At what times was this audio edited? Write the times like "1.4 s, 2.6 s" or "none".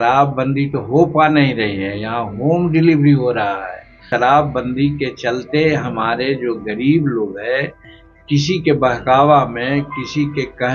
4.1 s